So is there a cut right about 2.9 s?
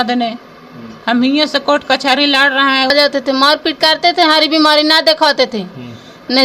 yes; 1 cut; at 2.9 s

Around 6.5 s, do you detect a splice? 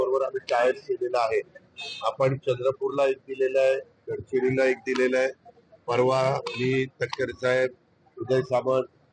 no; 1 cut; at 2.4 s

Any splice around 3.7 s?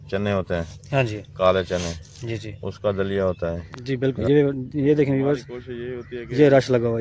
yes; 1 cut; at 3.7 s

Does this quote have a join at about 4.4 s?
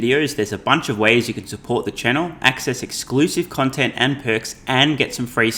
no; 0 cuts

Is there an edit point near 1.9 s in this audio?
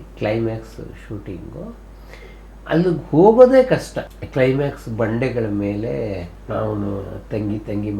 no; 0 cuts

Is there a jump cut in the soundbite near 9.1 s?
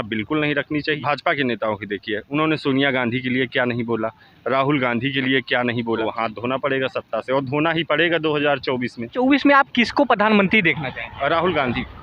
yes; 3 cuts; at 1.0 s, 6.0 s, 9.1 s

